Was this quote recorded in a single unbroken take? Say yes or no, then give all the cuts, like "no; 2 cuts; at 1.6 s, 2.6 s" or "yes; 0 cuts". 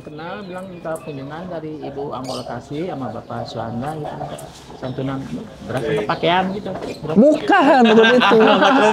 yes; 0 cuts